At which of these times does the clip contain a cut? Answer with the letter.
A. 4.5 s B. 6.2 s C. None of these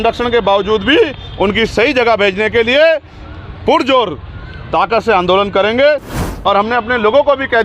B